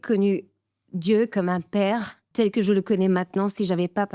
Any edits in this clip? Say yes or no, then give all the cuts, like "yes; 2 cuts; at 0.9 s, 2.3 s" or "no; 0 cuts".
yes; 1 cut; at 2.2 s